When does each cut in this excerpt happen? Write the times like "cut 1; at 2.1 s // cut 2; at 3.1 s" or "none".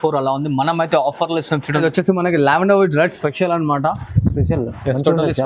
cut 1; at 1.8 s